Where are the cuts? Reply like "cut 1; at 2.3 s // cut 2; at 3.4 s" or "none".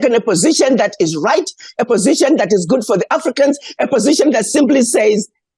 none